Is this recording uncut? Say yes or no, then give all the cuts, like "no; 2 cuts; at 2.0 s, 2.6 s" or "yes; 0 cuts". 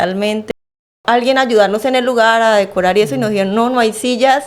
no; 1 cut; at 1.0 s